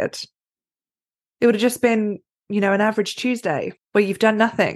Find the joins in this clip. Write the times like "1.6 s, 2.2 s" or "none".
3.8 s